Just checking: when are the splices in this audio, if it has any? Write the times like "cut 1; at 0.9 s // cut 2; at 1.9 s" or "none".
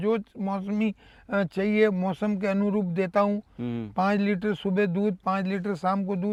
none